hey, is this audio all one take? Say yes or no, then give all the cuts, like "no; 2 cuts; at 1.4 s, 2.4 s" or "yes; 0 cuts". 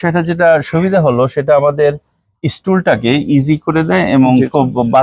yes; 0 cuts